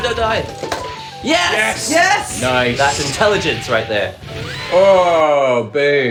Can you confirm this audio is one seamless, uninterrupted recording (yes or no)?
yes